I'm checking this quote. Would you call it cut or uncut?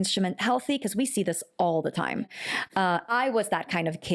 uncut